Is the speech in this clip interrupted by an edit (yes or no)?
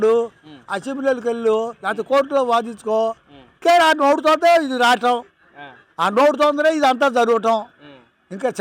yes